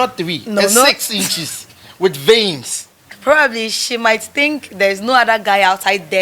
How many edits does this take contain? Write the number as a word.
one